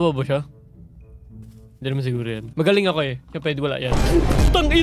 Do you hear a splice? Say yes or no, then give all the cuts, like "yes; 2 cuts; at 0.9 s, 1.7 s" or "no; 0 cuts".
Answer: no; 0 cuts